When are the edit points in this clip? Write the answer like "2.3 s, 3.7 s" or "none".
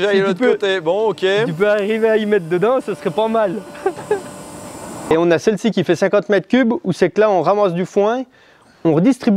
5.1 s